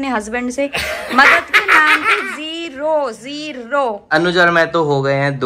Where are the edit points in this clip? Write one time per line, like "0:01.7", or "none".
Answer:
0:04.1